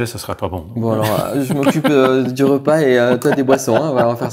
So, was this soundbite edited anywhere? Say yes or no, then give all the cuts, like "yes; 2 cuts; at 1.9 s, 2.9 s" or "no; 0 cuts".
no; 0 cuts